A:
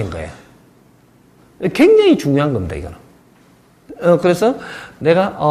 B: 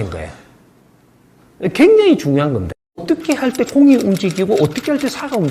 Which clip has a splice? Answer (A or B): B